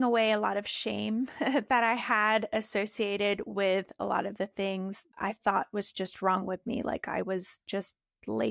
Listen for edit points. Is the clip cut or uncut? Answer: cut